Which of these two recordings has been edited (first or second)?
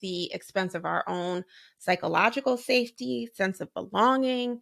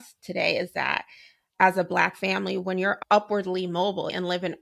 second